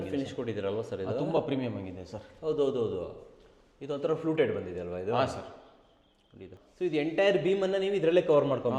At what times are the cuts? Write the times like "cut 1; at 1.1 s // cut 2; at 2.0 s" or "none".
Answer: cut 1; at 6.4 s